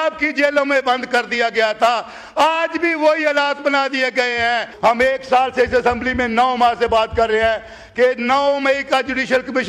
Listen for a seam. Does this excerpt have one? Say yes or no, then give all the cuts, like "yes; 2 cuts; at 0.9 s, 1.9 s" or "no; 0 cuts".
yes; 1 cut; at 4.7 s